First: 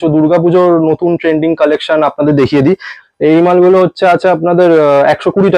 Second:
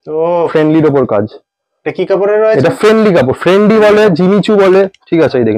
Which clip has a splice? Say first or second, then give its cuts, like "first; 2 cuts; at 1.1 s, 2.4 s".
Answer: first; 1 cut; at 2.9 s